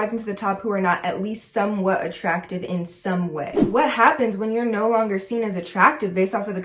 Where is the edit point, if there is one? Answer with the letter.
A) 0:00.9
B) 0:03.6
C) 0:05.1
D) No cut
B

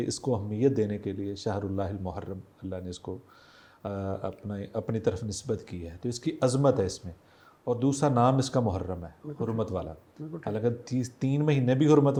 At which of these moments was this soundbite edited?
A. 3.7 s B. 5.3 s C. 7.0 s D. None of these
D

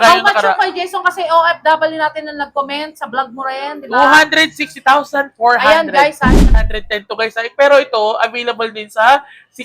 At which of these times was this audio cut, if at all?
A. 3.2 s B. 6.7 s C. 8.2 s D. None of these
B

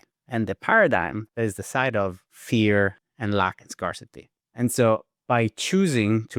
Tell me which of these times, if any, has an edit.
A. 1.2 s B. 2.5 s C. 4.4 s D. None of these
A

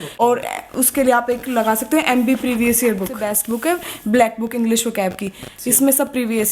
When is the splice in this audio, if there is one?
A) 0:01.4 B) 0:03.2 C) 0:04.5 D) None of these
B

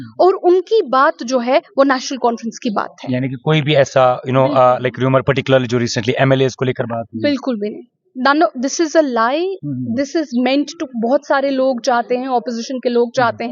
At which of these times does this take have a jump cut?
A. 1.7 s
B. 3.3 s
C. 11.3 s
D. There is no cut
D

